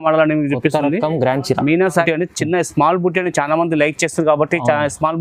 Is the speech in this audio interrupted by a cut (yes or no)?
yes